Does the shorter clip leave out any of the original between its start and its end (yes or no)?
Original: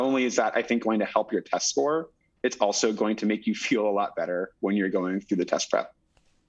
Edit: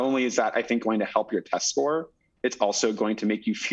no